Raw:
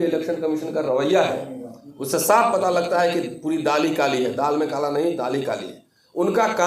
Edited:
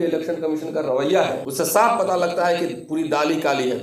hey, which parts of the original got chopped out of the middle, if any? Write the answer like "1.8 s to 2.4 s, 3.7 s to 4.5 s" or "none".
1.4 s to 2.0 s